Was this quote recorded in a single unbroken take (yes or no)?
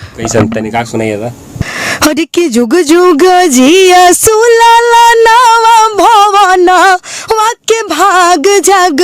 no